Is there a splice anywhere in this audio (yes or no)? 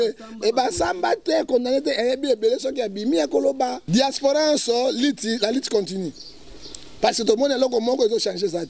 yes